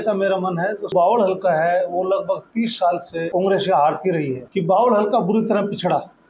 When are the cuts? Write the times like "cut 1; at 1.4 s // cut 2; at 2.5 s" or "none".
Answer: cut 1; at 0.9 s // cut 2; at 3.3 s // cut 3; at 4.4 s